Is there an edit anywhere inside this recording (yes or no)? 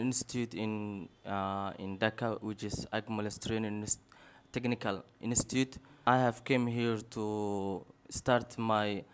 yes